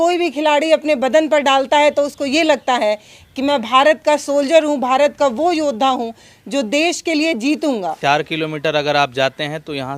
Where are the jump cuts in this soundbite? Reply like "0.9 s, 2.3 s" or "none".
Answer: 7.9 s